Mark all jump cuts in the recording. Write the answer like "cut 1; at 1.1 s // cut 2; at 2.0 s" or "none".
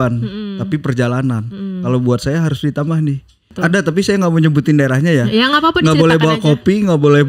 cut 1; at 3.5 s

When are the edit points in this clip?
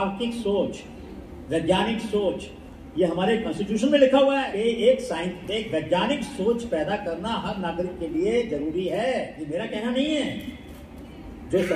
cut 1; at 4.4 s // cut 2; at 9.4 s

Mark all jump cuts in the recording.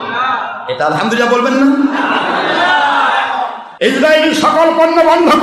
cut 1; at 3.6 s

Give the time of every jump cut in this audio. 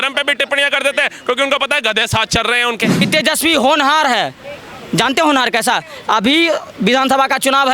cut 1; at 3.1 s

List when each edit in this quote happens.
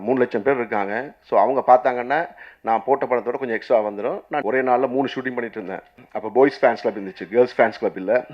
cut 1; at 4.4 s // cut 2; at 6.0 s

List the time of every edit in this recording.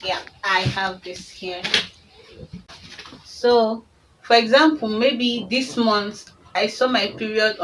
cut 1; at 2.7 s

